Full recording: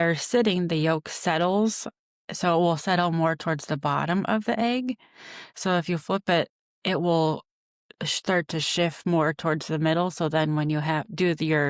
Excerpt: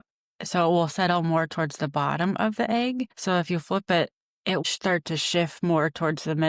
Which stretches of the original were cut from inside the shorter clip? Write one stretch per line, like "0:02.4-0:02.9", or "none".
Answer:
0:05.0-0:05.5
0:07.0-0:08.1